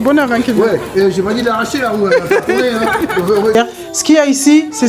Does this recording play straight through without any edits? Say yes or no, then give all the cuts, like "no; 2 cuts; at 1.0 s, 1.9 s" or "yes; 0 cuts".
no; 1 cut; at 3.5 s